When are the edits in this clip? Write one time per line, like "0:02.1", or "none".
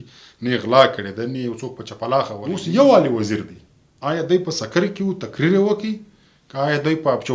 0:02.4